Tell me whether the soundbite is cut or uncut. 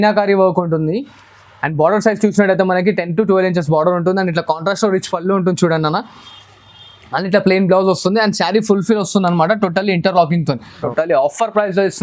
cut